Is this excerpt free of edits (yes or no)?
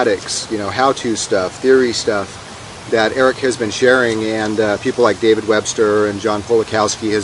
yes